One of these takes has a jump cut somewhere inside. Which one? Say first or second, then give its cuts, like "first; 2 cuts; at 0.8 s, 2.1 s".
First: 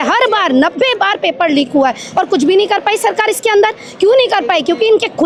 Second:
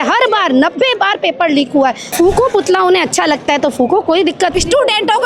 second; 2 cuts; at 2.0 s, 4.5 s